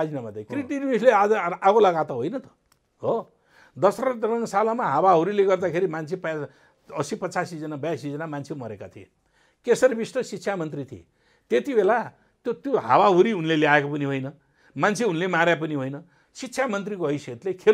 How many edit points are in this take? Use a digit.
0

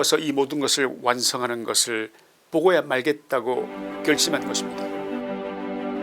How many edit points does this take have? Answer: 1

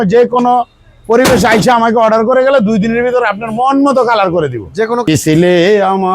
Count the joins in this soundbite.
1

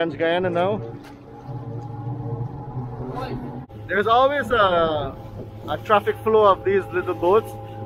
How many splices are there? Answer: 1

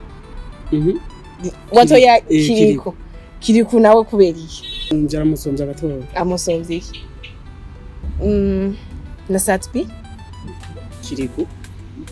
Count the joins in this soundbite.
2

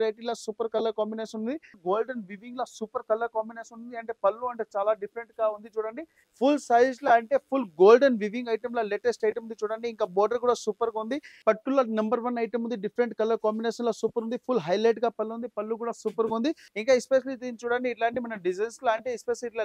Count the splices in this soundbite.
4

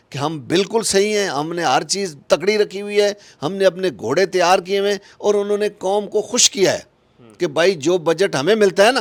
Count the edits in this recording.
0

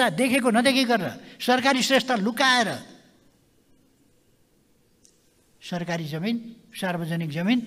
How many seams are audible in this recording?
0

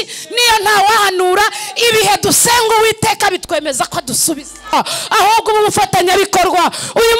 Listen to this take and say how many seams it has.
1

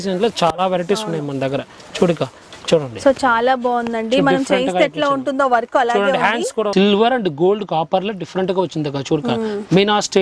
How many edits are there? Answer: 1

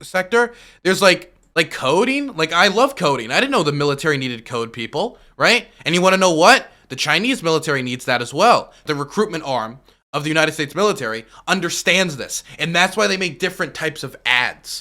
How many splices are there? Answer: 2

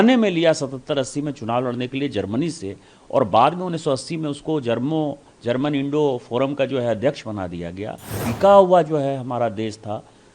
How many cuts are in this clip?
1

